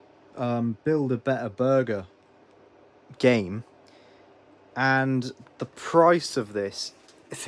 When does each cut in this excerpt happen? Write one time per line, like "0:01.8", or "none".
none

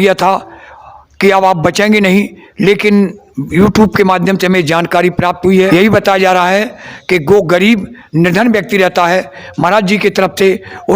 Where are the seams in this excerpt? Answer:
0:05.7

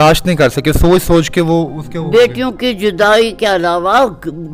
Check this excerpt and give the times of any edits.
none

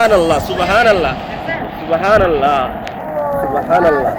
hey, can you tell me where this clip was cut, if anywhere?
none

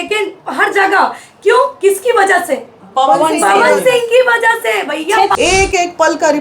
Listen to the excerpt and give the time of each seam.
0:05.3

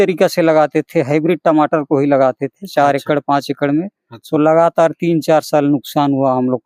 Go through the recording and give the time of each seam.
none

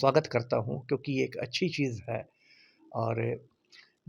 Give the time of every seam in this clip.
none

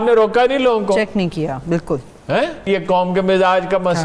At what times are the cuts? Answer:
0:02.7

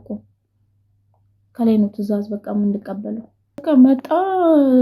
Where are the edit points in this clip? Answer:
0:03.6

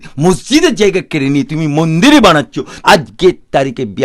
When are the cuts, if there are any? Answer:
0:02.7

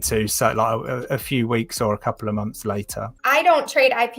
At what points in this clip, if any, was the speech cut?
0:03.1

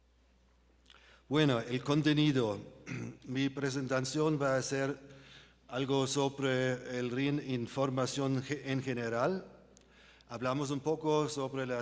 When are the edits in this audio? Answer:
none

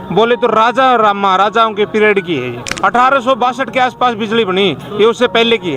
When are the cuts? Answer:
0:02.6

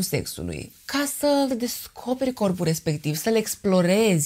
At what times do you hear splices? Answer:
none

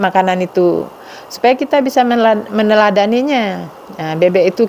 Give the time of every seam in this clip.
none

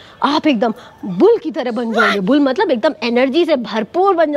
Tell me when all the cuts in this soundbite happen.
none

